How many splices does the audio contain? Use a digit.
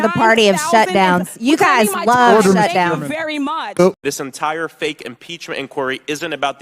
0